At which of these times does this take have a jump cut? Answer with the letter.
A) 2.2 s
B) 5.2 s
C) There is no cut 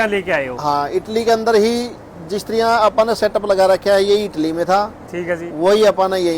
C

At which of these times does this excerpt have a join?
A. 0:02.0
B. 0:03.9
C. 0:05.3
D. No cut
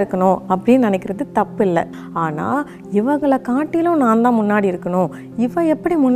A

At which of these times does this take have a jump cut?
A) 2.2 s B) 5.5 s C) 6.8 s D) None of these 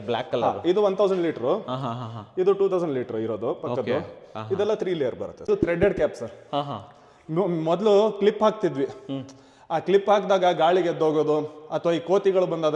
B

